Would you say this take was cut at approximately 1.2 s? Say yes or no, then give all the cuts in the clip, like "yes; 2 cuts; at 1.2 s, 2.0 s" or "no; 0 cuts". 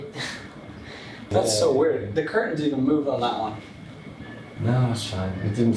yes; 1 cut; at 1.2 s